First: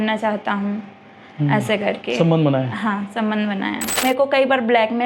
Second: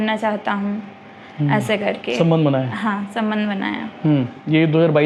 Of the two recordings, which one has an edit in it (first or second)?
first